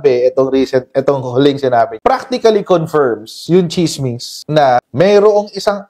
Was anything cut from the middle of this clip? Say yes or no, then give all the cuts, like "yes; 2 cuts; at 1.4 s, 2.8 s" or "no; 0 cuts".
no; 0 cuts